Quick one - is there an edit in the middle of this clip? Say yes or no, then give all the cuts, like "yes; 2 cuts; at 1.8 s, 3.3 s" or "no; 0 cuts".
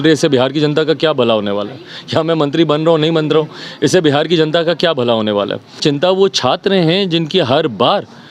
yes; 1 cut; at 5.8 s